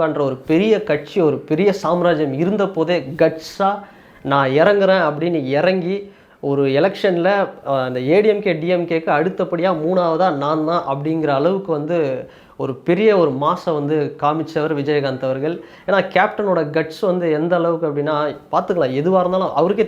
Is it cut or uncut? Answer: uncut